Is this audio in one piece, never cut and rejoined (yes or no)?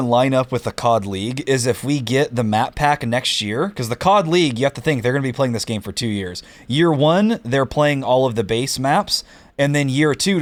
yes